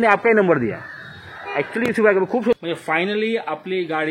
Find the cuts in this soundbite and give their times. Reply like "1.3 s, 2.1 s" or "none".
2.5 s